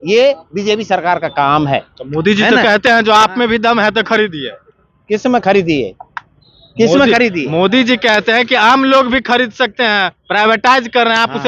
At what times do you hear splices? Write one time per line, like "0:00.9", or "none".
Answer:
none